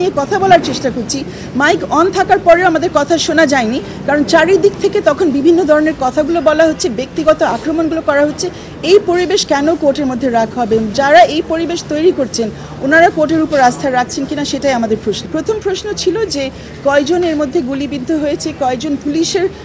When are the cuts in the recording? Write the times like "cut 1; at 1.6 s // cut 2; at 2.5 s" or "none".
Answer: none